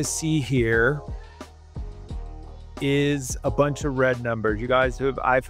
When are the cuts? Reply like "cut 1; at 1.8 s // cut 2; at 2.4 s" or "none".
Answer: none